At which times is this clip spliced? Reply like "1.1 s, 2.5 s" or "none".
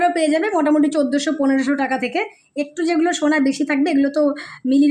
none